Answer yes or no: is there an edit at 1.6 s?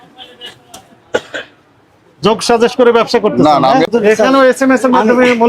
no